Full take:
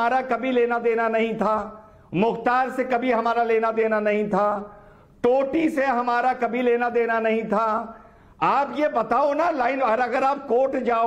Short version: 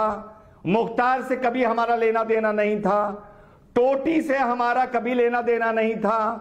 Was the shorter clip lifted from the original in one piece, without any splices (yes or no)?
yes